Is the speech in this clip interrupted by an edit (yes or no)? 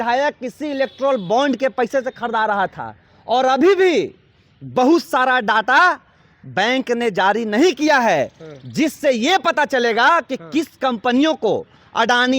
no